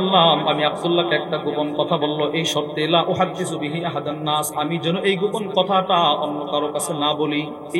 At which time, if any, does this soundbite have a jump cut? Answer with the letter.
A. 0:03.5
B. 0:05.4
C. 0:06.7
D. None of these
D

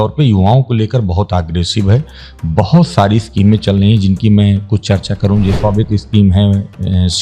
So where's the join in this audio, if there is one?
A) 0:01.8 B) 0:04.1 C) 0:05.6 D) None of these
C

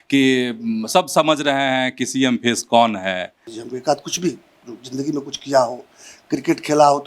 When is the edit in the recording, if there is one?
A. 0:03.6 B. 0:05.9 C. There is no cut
A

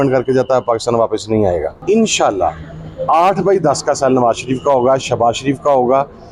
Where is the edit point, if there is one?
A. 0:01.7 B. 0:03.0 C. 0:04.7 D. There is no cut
A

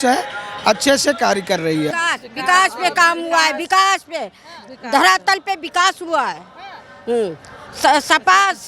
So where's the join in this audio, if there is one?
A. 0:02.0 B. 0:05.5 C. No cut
A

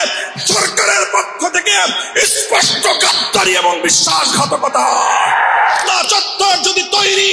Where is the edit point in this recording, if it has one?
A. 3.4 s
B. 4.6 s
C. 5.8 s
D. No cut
C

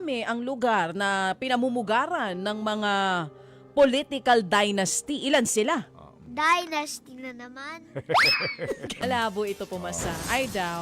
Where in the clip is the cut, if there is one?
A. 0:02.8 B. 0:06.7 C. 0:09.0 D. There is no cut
C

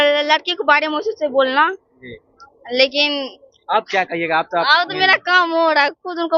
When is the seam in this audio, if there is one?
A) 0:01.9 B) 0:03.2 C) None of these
C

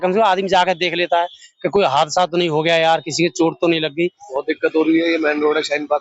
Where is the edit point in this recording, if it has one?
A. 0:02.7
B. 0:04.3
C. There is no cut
B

